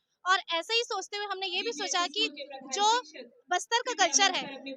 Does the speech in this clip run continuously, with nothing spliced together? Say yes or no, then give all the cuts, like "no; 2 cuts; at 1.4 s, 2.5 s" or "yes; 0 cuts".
yes; 0 cuts